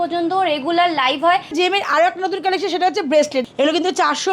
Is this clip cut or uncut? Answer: cut